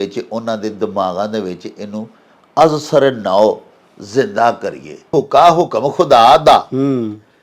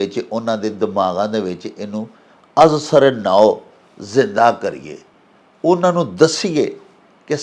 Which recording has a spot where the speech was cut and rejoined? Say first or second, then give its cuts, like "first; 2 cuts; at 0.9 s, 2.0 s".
first; 1 cut; at 5.1 s